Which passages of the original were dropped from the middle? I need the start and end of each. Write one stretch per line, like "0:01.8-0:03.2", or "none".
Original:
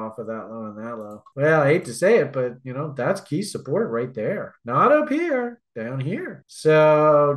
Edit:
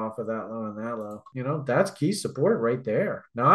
0:01.3-0:02.6